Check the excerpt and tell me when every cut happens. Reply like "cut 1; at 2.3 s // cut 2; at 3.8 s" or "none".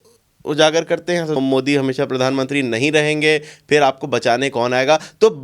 cut 1; at 1.4 s